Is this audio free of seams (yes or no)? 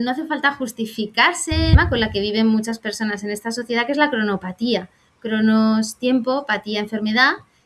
no